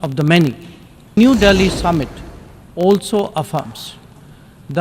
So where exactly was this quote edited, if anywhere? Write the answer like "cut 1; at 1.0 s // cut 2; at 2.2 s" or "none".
cut 1; at 1.2 s

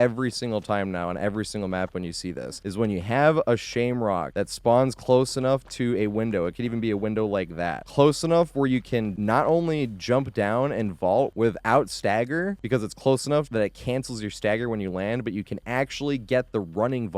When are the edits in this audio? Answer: cut 1; at 9.1 s

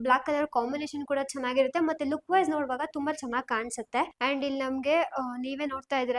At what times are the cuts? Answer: cut 1; at 4.1 s

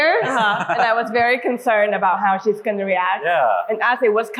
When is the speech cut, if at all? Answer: none

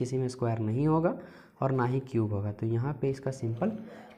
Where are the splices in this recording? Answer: none

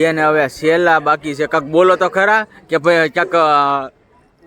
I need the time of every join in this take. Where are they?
none

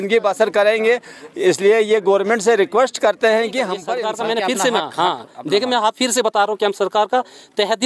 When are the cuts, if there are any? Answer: cut 1; at 4.0 s

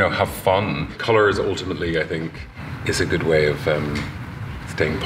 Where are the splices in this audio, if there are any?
cut 1; at 0.9 s // cut 2; at 2.6 s

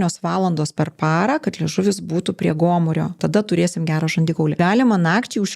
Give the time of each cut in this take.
cut 1; at 3.2 s // cut 2; at 4.6 s

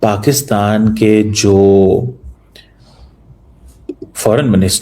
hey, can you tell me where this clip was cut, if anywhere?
none

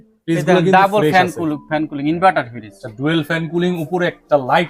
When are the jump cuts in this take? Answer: none

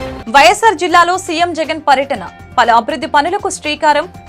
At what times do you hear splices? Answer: none

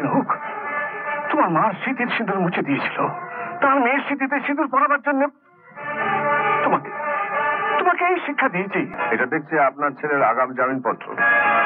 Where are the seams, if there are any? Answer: cut 1; at 8.9 s

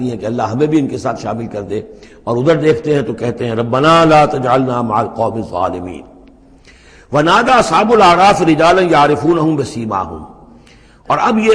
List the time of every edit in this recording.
none

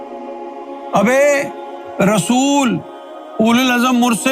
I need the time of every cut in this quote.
cut 1; at 0.9 s

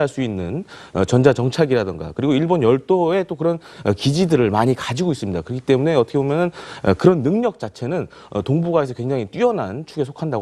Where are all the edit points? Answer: none

